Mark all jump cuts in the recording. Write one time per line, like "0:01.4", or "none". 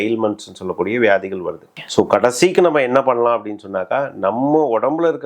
0:01.7